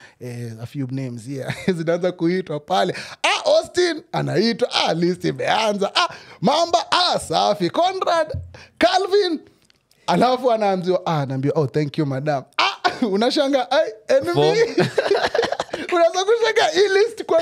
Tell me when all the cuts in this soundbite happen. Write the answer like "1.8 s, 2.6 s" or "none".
none